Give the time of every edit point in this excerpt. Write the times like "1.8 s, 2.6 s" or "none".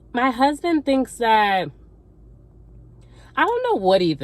none